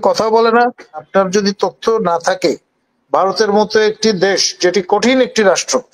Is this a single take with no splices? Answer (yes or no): no